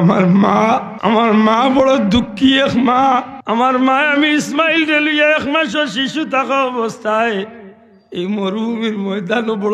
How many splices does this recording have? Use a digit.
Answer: 2